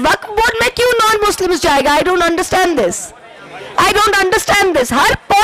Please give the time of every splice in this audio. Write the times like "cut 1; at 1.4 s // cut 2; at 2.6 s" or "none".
none